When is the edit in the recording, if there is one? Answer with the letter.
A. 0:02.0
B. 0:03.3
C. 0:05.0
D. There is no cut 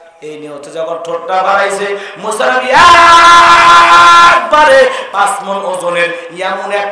C